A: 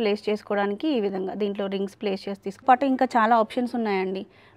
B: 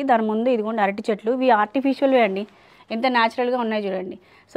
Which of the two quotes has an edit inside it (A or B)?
A